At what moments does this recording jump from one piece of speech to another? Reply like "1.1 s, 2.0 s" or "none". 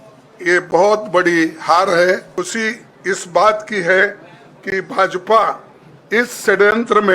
2.3 s